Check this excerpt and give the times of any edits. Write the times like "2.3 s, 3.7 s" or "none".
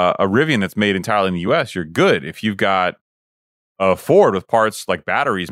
none